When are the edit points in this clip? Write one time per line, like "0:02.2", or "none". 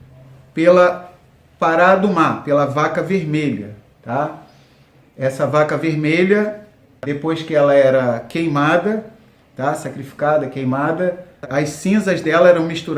0:07.0
0:11.5